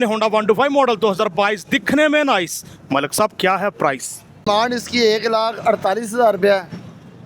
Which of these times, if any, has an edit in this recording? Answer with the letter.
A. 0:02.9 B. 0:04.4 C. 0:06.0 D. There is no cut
B